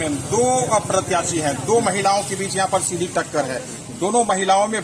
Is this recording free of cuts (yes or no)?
yes